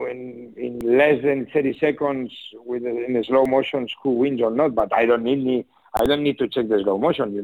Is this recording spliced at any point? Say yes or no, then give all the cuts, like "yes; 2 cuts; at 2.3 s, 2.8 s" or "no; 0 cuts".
no; 0 cuts